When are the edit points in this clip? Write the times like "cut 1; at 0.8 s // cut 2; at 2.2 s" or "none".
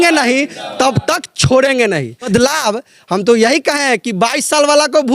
cut 1; at 2.3 s